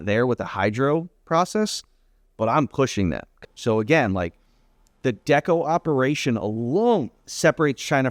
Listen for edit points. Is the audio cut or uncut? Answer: cut